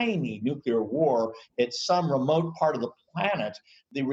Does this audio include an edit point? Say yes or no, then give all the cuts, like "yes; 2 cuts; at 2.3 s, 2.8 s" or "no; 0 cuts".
no; 0 cuts